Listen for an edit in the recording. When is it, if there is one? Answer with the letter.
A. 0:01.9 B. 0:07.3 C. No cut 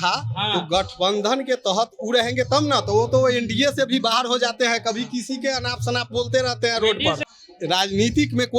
B